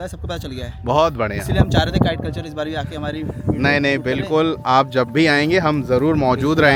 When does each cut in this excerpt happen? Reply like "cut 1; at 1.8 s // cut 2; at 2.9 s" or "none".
none